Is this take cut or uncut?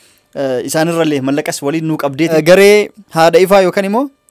cut